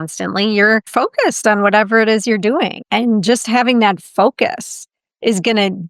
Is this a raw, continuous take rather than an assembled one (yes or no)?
no